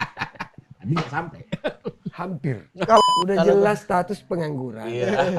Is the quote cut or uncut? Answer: cut